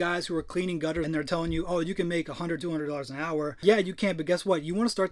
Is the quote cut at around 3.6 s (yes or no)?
yes